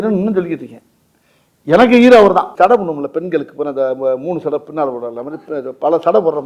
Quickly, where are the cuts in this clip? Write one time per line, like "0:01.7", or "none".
0:02.5